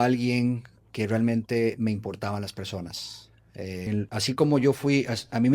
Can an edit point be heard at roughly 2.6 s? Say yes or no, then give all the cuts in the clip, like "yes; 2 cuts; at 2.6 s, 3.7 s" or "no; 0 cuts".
no; 1 cut; at 3.8 s